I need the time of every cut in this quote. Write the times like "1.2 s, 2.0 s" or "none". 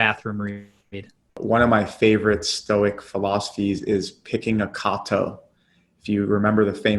1.3 s